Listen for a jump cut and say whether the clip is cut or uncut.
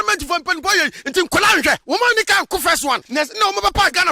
cut